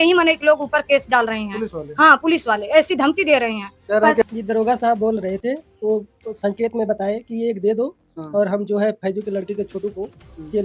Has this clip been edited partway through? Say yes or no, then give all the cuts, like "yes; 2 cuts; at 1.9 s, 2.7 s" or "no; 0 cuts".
yes; 1 cut; at 4.2 s